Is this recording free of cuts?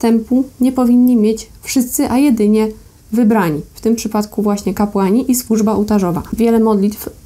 yes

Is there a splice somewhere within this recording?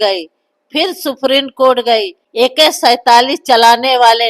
yes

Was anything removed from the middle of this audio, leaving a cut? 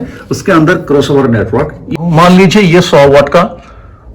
yes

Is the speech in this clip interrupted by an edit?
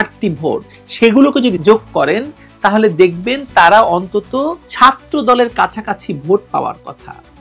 no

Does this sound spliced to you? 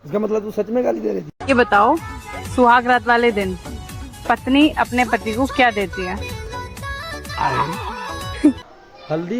no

